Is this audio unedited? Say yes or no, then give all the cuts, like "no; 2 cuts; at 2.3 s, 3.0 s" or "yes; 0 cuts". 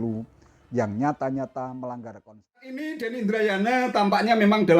no; 1 cut; at 2.9 s